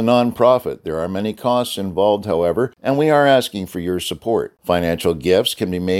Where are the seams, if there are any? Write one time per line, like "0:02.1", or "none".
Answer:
0:02.8